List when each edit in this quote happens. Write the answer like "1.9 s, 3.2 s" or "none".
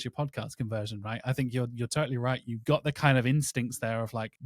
none